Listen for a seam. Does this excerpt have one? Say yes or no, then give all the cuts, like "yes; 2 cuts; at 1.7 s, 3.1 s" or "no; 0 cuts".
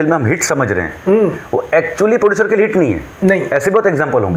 no; 0 cuts